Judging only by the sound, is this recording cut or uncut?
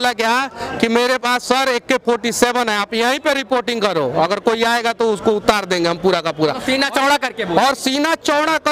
uncut